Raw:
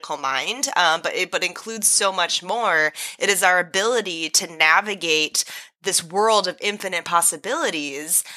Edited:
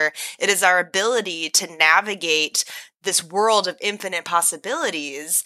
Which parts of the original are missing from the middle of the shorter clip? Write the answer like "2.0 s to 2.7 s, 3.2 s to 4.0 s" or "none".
none